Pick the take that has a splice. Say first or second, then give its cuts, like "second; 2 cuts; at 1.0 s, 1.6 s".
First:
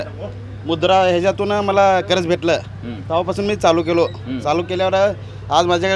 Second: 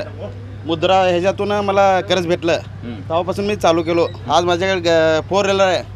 second; 1 cut; at 4.2 s